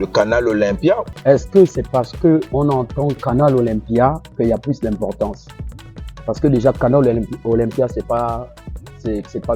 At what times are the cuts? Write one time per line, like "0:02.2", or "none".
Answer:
0:01.0